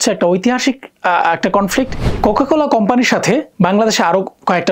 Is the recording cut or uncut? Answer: cut